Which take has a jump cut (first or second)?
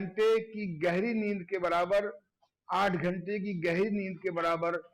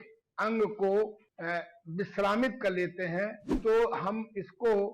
second